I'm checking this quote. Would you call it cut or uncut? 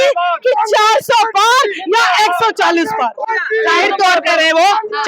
uncut